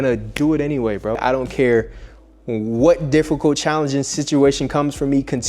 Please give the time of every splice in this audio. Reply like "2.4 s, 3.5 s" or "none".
1.2 s